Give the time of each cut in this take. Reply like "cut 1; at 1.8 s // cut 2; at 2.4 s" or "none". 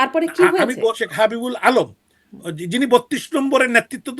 cut 1; at 1.0 s